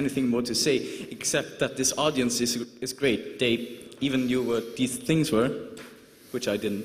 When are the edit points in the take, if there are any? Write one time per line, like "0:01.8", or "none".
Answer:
none